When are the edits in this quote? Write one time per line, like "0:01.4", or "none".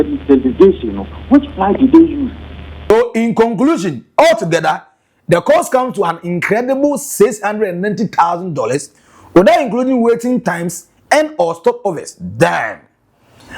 0:02.9